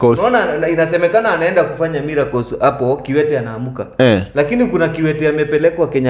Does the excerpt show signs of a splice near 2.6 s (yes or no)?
no